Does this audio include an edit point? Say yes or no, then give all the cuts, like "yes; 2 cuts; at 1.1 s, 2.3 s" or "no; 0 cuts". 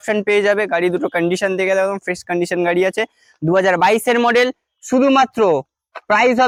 no; 0 cuts